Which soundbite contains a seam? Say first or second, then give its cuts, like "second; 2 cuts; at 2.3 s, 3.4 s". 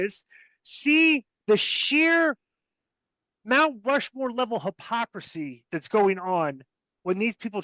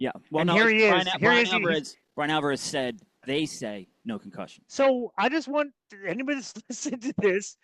second; 1 cut; at 4.6 s